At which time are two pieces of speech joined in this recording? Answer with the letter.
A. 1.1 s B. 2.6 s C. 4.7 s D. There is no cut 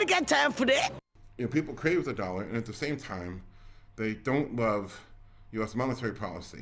A